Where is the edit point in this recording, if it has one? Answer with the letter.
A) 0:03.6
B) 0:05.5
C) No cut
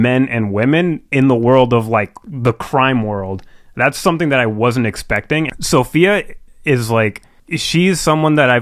B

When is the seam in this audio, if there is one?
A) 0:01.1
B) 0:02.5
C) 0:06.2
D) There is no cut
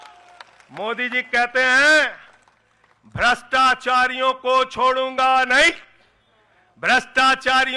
D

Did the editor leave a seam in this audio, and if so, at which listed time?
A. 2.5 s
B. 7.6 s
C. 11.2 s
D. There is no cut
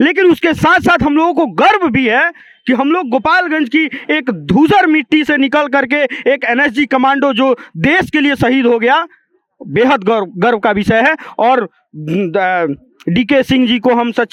D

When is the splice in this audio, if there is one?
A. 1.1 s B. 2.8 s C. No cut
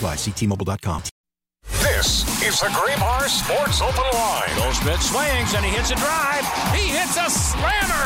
A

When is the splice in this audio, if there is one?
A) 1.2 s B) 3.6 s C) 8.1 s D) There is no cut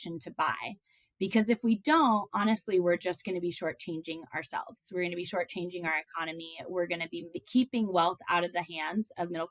D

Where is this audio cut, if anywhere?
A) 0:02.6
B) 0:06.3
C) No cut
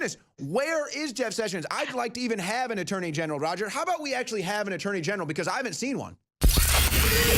B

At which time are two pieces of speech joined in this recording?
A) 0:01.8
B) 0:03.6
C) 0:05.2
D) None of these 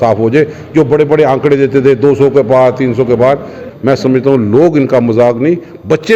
B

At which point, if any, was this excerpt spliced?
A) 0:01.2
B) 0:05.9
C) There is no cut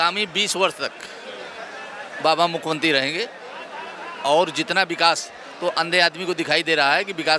C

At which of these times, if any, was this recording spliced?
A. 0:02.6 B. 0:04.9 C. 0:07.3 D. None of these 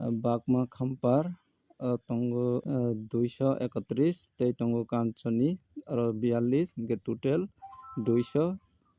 A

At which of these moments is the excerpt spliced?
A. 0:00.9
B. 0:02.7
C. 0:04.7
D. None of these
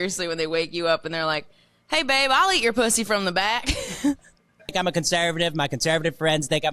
C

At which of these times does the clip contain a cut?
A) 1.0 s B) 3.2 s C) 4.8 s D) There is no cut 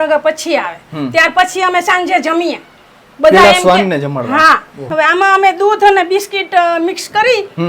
C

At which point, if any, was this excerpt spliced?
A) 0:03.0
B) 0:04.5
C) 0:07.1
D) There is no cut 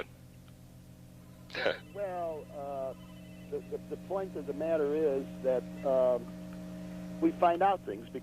B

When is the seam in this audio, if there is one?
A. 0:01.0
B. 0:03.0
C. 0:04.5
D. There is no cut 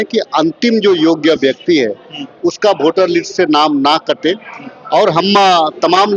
D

